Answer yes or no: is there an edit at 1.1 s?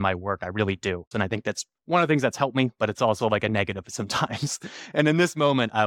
yes